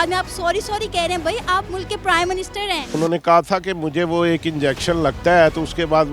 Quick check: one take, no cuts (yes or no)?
no